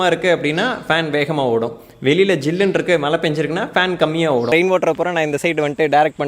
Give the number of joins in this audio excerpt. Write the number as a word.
one